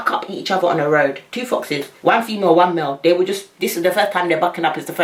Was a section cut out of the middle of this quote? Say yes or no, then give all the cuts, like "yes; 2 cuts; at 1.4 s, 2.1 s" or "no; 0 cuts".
no; 0 cuts